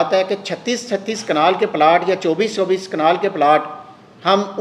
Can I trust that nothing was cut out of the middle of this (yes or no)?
yes